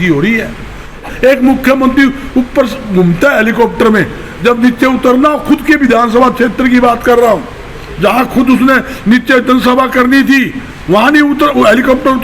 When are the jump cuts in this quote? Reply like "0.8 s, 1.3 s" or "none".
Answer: 1.0 s